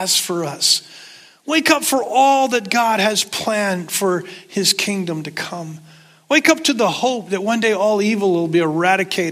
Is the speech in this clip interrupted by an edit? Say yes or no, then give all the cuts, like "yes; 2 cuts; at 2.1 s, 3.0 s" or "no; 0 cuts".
no; 0 cuts